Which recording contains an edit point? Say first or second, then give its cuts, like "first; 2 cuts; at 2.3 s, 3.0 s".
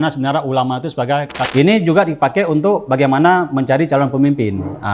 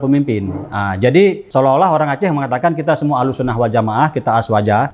first; 1 cut; at 1.4 s